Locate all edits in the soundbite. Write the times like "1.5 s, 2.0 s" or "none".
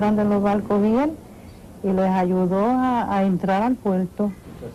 none

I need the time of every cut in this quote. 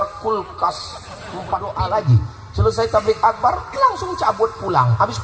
1.7 s

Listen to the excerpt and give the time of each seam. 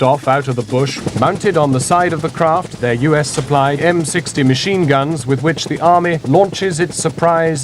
1.0 s, 2.7 s, 3.8 s, 6.2 s

